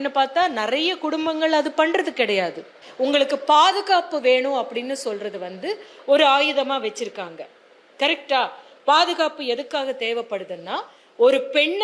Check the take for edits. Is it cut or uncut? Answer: cut